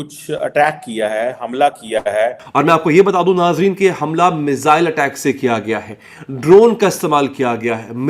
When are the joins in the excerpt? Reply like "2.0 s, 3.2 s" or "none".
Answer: 2.4 s